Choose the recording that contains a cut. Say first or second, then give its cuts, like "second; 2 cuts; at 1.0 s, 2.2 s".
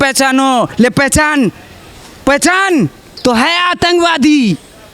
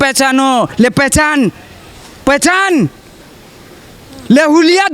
first; 1 cut; at 3.1 s